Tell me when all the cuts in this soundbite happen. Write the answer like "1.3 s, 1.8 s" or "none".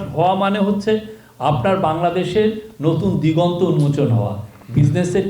none